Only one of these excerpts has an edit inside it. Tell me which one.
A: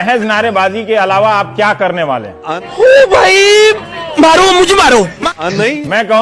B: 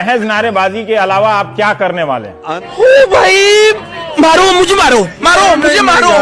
A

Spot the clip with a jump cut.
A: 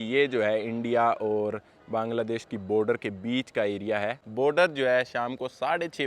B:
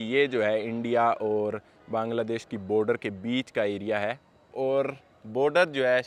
A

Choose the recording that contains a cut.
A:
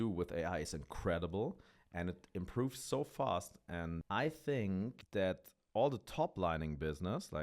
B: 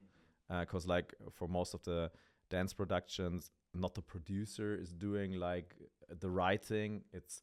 A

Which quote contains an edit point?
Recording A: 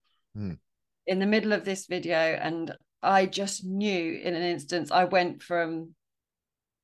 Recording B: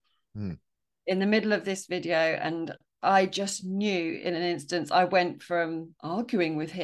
B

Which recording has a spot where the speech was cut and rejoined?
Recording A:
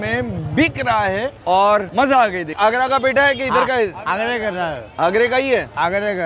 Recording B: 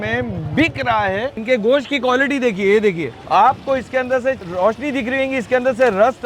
B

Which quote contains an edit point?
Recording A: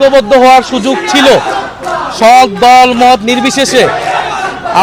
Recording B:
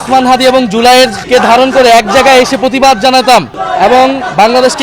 B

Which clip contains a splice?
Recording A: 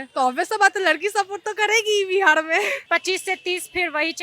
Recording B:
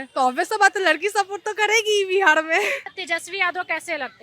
B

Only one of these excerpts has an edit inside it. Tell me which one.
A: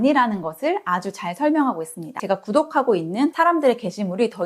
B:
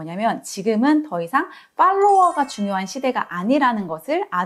A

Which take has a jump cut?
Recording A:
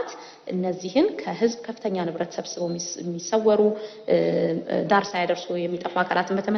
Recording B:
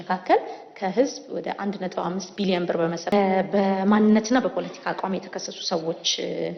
B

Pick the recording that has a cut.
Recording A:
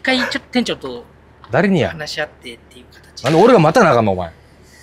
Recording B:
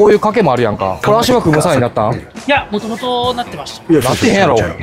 B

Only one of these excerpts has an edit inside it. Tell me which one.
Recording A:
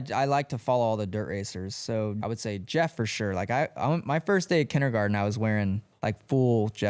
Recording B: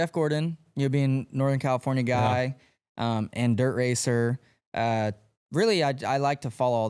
A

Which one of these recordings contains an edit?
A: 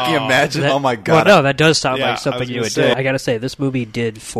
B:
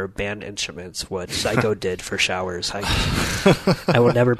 A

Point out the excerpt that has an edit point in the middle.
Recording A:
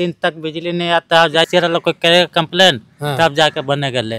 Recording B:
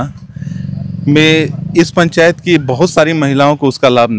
A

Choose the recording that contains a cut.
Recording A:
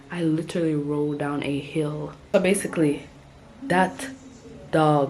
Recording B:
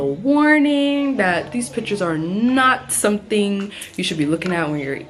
A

